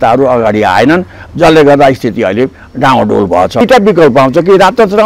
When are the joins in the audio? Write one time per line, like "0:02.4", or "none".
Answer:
0:03.6